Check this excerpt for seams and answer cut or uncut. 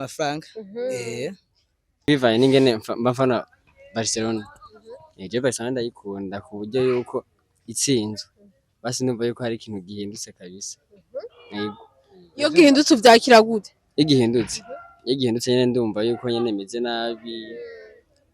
cut